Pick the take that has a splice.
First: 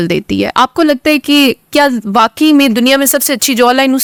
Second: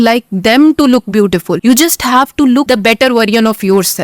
second; 2 cuts; at 1.5 s, 2.7 s

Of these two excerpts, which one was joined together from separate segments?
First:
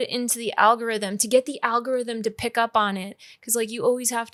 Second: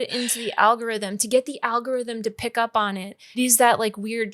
second; 1 cut; at 3.4 s

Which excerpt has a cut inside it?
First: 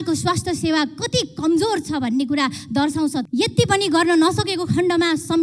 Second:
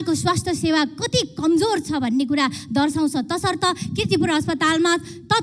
first; 1 cut; at 3.2 s

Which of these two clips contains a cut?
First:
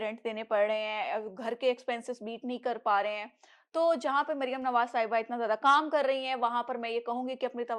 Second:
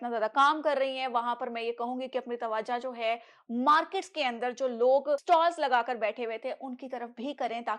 second; 1 cut; at 5.2 s

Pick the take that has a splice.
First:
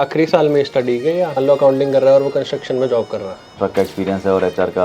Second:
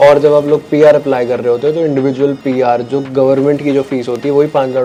first; 2 cuts; at 1.4 s, 3.5 s

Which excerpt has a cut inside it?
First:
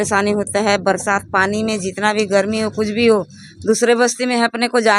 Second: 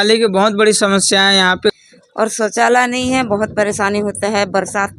second; 1 cut; at 1.8 s

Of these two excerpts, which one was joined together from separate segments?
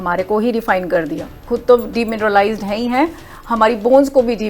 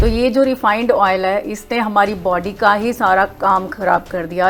first; 1 cut; at 1.4 s

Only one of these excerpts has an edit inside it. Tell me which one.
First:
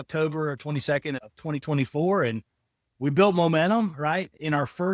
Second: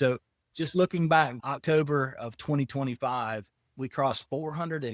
second; 2 cuts; at 1.4 s, 3.8 s

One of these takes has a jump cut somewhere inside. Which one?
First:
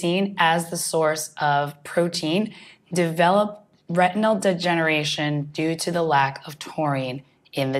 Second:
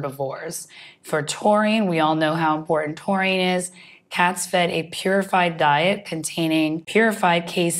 second; 1 cut; at 6.8 s

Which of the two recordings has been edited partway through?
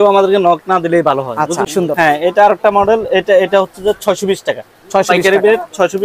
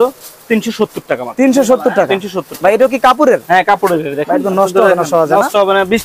first; 1 cut; at 1.7 s

